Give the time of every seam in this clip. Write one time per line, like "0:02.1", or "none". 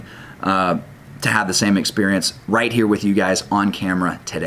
none